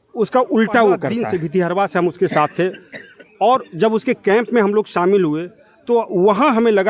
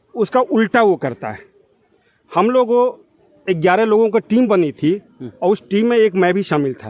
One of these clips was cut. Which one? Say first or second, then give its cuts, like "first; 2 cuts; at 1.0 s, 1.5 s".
first; 1 cut; at 1.2 s